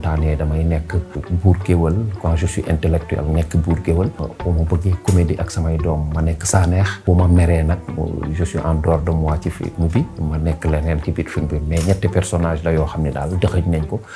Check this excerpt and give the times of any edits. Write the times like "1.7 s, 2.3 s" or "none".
1.2 s, 4.3 s, 7.0 s